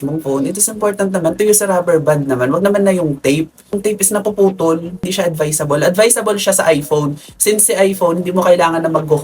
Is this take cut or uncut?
cut